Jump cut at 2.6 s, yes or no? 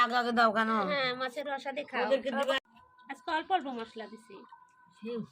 yes